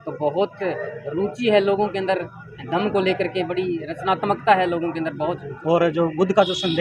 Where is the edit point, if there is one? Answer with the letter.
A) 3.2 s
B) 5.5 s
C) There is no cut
B